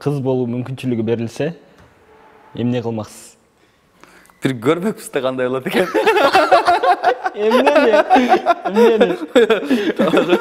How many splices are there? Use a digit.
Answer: 0